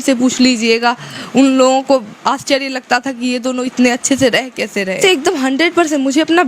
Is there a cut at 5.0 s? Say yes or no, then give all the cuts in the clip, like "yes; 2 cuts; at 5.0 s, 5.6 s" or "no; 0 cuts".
yes; 1 cut; at 5.0 s